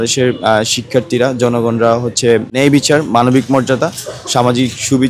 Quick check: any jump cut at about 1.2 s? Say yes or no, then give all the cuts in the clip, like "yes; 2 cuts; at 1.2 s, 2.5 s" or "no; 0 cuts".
no; 1 cut; at 2.5 s